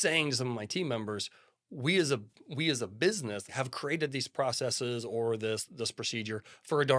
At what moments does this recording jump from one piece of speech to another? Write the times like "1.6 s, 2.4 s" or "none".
3.5 s